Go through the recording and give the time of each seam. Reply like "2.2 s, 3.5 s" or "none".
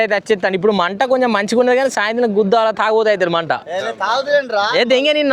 none